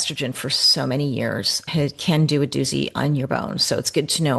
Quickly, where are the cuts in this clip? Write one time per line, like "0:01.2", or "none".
none